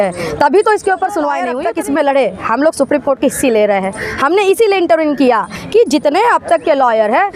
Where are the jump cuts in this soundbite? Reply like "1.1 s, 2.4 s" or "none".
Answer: 1.5 s

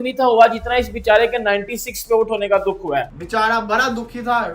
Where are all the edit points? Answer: 3.1 s

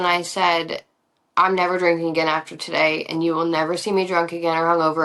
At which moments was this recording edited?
none

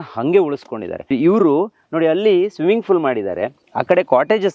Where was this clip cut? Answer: 1.1 s

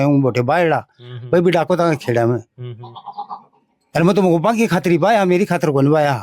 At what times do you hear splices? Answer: none

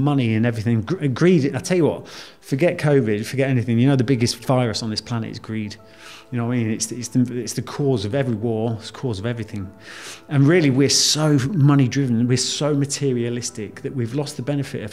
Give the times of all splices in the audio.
none

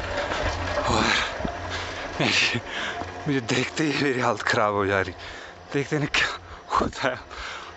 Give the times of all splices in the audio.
none

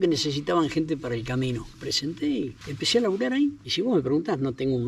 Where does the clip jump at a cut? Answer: 1.7 s, 2.6 s, 3.6 s

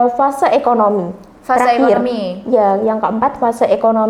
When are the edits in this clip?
none

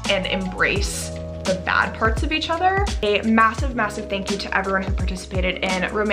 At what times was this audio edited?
3.0 s

